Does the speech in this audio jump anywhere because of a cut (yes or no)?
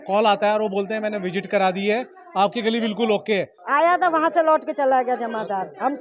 yes